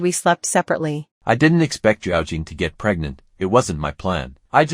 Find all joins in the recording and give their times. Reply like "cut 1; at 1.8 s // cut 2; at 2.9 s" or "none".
cut 1; at 1.0 s